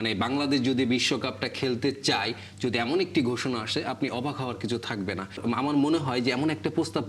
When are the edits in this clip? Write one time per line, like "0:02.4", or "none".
0:05.4